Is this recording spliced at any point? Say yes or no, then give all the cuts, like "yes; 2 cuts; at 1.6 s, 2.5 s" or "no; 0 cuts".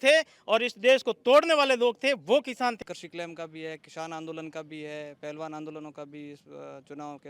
yes; 1 cut; at 2.8 s